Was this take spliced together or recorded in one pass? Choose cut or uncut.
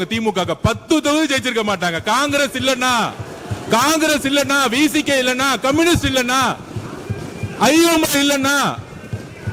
uncut